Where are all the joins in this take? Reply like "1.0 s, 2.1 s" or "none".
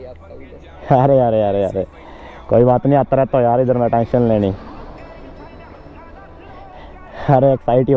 6.7 s